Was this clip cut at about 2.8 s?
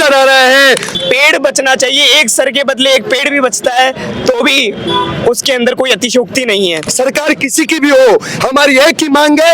no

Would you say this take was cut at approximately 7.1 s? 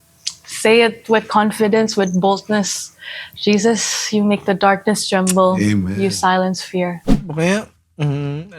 yes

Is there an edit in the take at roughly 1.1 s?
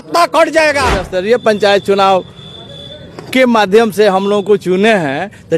yes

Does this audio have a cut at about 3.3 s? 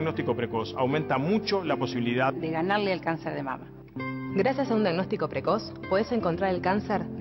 yes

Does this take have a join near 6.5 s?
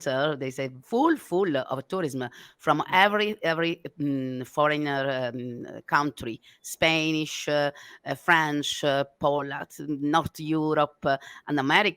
no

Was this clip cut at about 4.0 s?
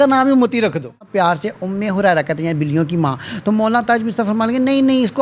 no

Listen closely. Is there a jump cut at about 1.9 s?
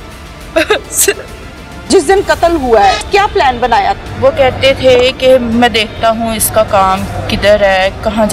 yes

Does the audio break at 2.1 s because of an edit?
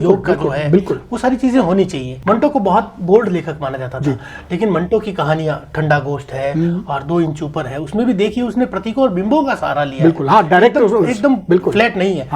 yes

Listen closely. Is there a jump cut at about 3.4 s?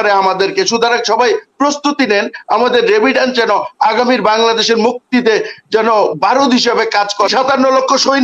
no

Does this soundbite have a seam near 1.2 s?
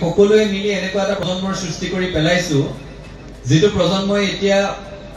yes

